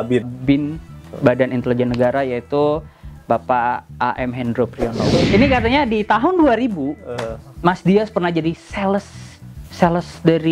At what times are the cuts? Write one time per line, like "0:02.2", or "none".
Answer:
0:05.1